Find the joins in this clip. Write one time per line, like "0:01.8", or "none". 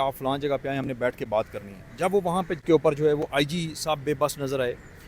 0:02.6